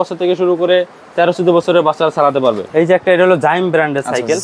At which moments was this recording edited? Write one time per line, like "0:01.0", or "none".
0:02.6